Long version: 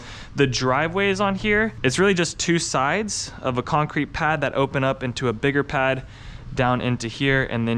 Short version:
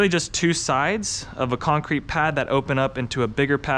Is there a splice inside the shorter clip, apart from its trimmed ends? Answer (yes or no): no